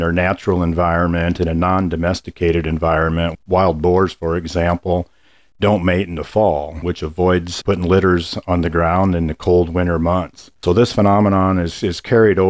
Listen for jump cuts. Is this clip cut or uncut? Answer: cut